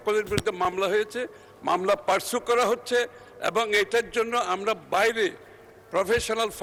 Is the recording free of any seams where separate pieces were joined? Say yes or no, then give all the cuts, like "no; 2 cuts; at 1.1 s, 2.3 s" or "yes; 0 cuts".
yes; 0 cuts